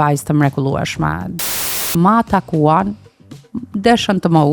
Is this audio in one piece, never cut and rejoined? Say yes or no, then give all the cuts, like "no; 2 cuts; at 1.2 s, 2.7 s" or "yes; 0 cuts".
no; 1 cut; at 1.4 s